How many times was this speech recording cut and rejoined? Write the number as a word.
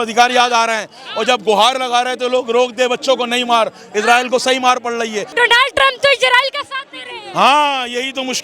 one